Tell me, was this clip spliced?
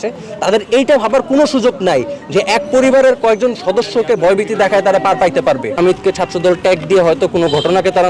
yes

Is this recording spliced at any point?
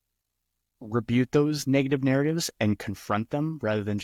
no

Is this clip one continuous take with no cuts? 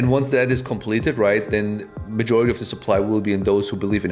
yes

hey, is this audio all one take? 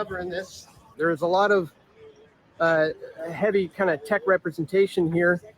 no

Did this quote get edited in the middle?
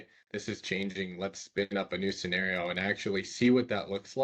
no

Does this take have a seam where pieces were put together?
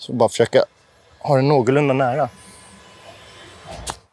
yes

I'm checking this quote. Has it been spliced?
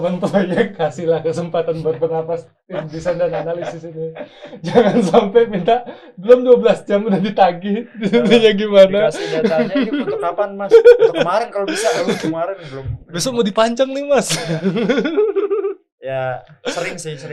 no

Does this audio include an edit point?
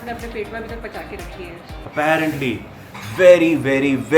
yes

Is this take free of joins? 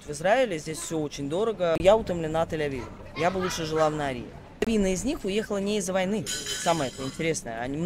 no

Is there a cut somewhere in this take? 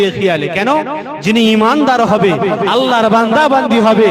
no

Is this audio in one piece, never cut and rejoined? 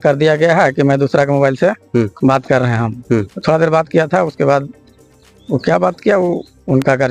yes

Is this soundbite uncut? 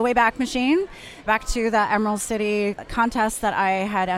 no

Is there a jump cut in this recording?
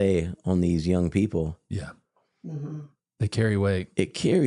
no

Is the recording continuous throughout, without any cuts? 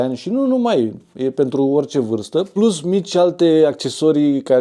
no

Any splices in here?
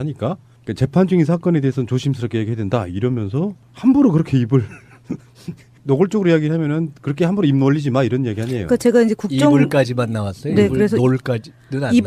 yes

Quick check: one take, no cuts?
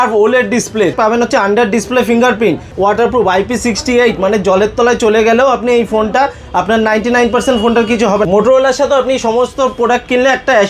no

